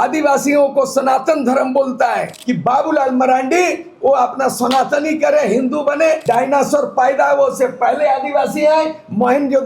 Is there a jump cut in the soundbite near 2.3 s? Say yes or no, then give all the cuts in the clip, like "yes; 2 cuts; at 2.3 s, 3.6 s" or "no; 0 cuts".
yes; 2 cuts; at 2.3 s, 6.2 s